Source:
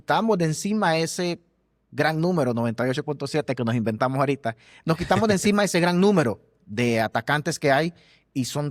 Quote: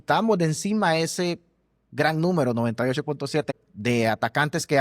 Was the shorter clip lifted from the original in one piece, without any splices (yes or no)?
no